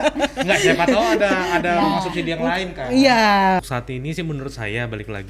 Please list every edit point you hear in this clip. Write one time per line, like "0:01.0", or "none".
0:03.7